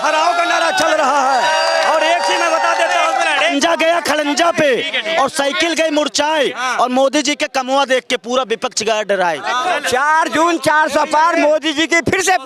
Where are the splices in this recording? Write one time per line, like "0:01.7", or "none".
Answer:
0:03.4
0:09.6